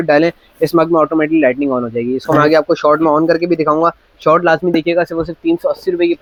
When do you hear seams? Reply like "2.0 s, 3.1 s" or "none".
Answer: none